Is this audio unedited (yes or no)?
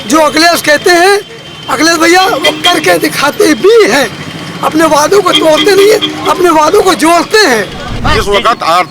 no